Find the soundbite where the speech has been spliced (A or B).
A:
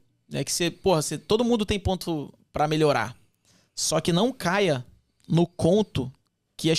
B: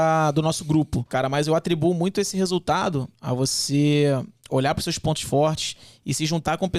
B